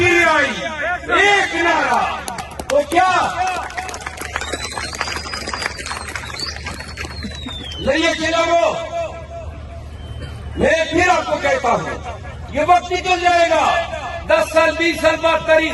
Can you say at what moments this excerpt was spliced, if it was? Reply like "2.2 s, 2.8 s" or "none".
none